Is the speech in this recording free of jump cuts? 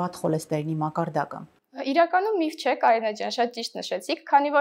yes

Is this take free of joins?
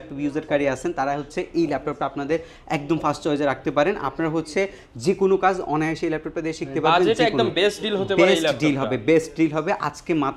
yes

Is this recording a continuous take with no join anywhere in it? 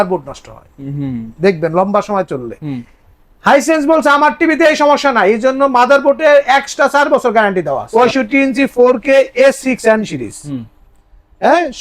no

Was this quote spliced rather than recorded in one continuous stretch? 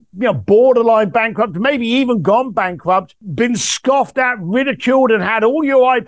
yes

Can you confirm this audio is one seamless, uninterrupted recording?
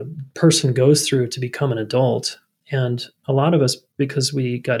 yes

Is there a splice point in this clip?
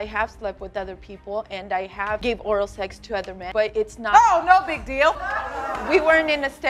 no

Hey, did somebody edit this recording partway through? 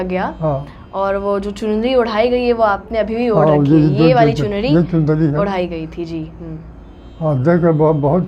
no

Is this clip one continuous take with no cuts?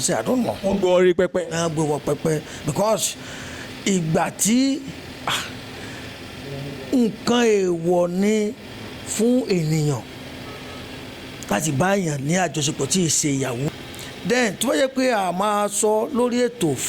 no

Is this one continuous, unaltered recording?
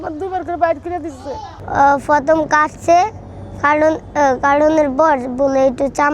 no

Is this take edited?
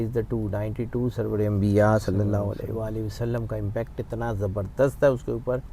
no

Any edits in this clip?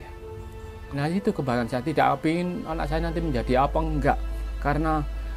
yes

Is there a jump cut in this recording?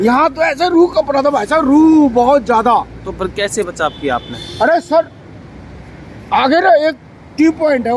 no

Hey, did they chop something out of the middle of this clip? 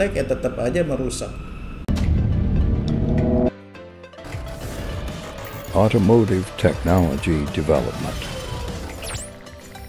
yes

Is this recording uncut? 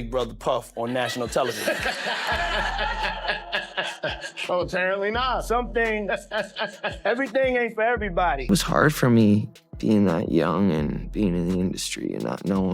no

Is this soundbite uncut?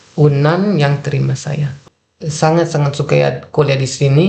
no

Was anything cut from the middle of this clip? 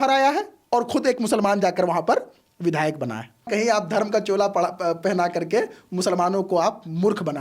yes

